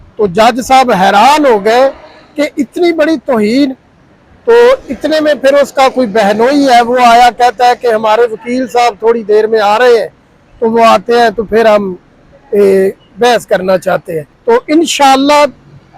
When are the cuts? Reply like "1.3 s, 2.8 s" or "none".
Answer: none